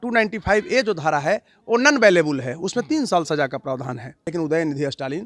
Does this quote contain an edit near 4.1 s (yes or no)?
yes